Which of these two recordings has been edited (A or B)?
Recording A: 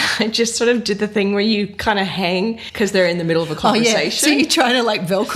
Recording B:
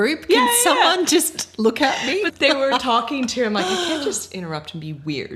A